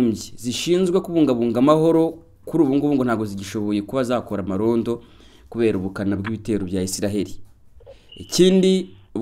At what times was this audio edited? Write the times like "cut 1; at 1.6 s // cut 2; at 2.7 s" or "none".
none